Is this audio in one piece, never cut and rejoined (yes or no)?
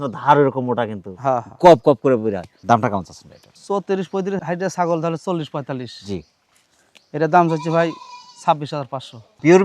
yes